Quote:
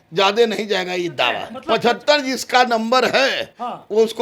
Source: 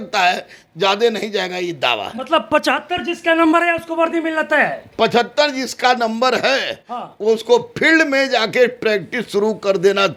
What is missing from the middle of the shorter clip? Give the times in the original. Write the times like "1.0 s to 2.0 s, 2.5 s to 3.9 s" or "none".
2.1 s to 4.8 s

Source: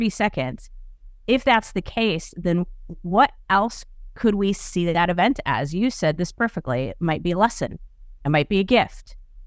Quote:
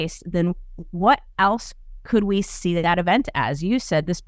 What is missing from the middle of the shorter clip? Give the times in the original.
none

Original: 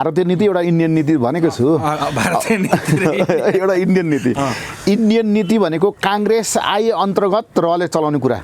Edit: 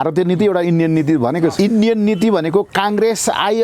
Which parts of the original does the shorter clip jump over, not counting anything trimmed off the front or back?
1.5 s to 4.8 s

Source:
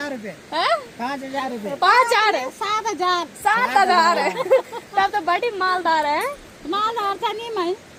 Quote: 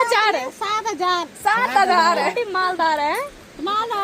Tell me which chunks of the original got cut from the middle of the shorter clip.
4.3 s to 5.4 s

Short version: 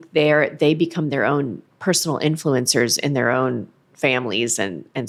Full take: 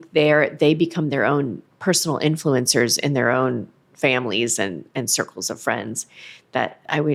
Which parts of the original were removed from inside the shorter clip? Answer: none

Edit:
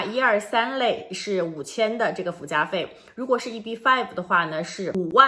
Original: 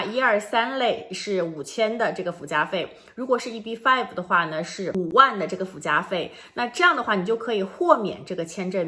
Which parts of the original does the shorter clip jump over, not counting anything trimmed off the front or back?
none

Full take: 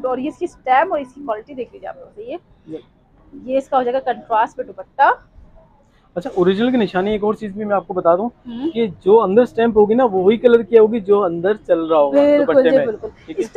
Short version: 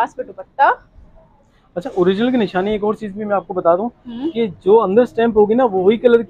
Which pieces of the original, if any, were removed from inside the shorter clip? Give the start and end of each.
none

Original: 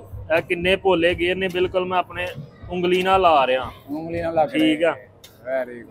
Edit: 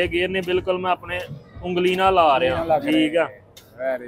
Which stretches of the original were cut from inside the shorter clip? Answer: 3.6 s to 4.2 s

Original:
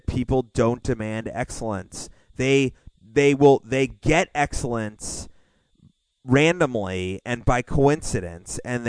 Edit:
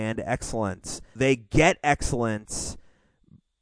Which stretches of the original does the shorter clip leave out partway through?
2.2 s to 3.7 s

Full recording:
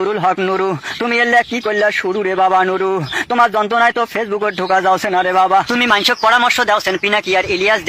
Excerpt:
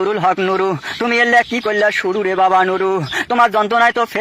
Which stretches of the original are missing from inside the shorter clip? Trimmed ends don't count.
none

